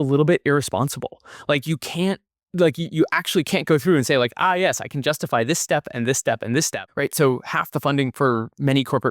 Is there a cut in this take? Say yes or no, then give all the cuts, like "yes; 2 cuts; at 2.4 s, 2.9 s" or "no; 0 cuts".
yes; 1 cut; at 6.8 s